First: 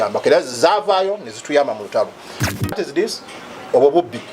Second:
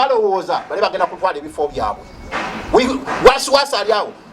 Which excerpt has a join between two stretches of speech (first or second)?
first